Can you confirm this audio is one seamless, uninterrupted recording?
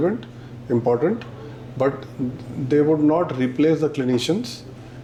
yes; 0 cuts

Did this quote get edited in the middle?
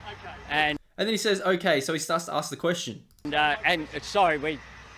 no; 0 cuts

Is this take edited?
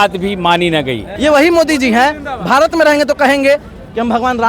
yes; 1 cut; at 1.1 s

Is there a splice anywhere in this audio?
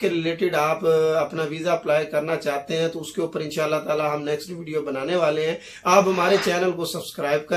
no; 0 cuts

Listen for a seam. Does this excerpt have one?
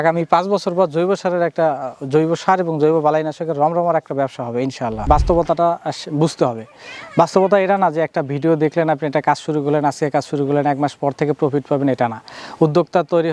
yes; 1 cut; at 5.0 s

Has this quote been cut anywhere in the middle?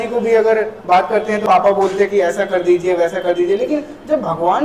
yes; 1 cut; at 1.4 s

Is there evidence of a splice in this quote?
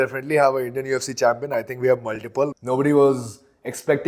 yes; 1 cut; at 2.6 s

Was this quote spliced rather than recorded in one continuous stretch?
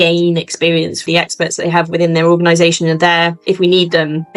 yes; 2 cuts; at 1.1 s, 3.4 s

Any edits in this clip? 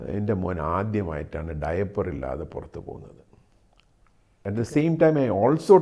yes; 1 cut; at 4.4 s

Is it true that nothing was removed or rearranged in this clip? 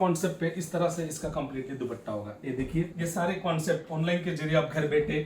no; 1 cut; at 3.0 s

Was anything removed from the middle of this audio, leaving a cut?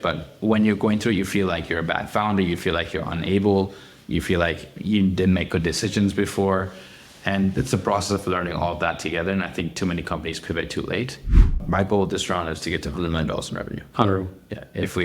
yes; 1 cut; at 11.4 s

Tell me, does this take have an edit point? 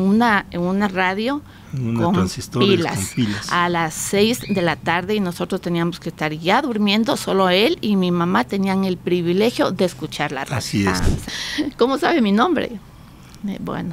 yes; 1 cut; at 11.4 s

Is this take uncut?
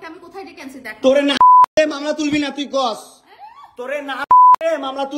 yes; 0 cuts

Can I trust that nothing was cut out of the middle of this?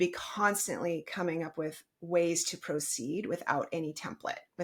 yes; 0 cuts

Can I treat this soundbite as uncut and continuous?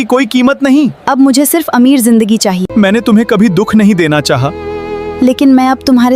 no; 1 cut; at 2.6 s

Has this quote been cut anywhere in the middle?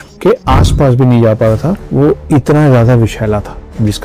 yes; 1 cut; at 1.8 s

